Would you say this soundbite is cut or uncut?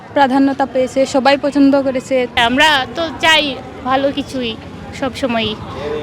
cut